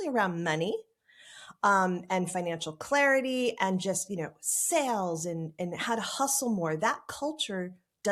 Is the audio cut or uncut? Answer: uncut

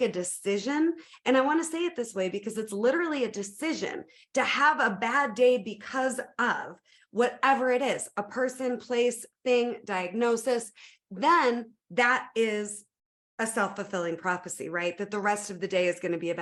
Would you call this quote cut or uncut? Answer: uncut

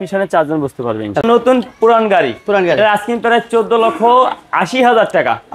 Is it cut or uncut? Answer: cut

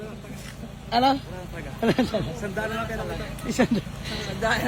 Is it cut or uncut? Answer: uncut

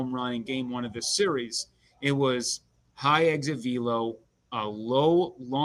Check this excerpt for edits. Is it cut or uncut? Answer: uncut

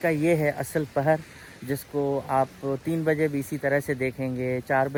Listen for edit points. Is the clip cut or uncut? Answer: uncut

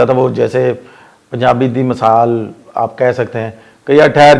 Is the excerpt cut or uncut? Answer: uncut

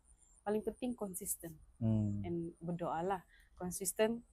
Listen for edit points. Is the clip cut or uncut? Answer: uncut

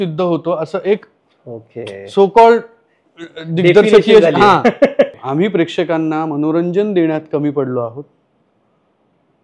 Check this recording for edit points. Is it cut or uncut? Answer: cut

